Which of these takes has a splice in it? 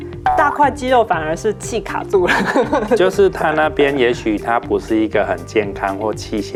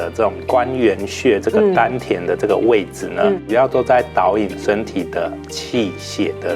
second; 1 cut; at 3.5 s

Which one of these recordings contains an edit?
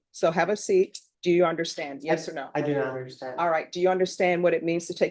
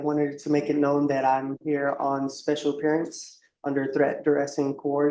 first; 1 cut; at 1.1 s

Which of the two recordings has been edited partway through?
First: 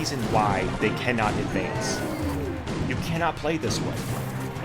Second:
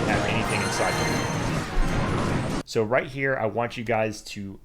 second; 2 cuts; at 1.5 s, 2.6 s

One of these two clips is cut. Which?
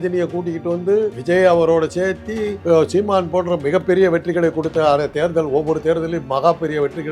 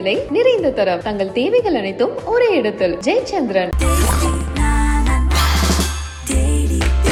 first; 2 cuts; at 1.2 s, 2.5 s

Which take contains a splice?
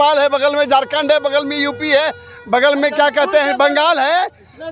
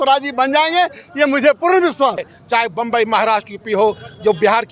second; 1 cut; at 2.3 s

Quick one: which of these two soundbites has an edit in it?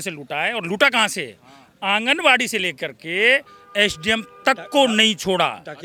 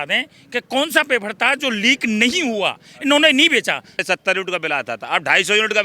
second; 1 cut; at 4.0 s

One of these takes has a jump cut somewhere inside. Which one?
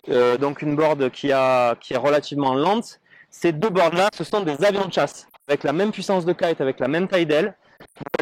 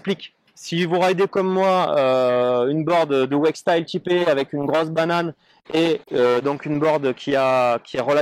first; 1 cut; at 5.5 s

